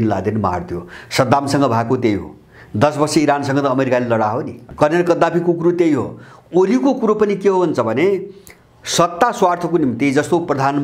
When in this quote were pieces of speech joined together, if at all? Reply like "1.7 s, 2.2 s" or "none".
4.6 s